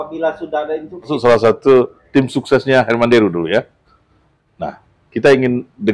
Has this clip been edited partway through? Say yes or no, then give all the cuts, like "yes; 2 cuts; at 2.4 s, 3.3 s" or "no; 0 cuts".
yes; 1 cut; at 1.1 s